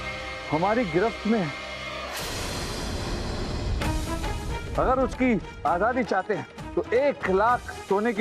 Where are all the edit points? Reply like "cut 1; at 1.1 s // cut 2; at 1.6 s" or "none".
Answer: cut 1; at 6.6 s